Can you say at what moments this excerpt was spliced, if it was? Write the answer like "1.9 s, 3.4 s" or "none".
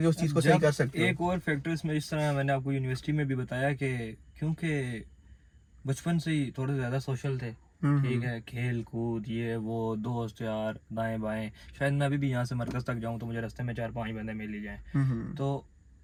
none